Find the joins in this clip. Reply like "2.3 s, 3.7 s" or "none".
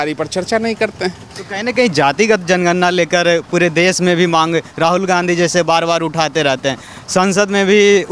none